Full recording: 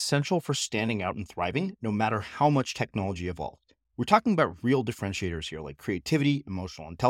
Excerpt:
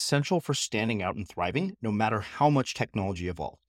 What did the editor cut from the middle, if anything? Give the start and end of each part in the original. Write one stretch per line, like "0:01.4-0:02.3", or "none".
none